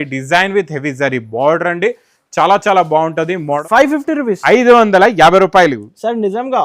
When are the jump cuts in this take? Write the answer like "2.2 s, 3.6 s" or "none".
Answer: 3.6 s